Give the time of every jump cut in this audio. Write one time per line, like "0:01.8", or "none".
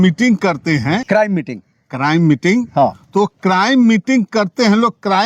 0:01.0